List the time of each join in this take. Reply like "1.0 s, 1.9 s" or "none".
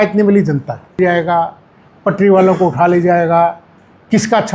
1.0 s